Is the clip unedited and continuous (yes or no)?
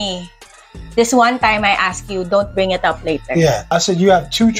no